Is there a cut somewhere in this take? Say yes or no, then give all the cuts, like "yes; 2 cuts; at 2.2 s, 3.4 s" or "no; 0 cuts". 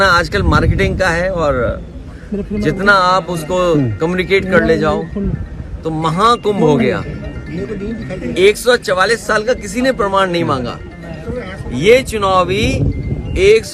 no; 0 cuts